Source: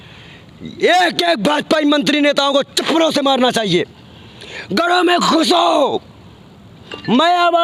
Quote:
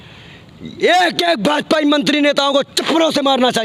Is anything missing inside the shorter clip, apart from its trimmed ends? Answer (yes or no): no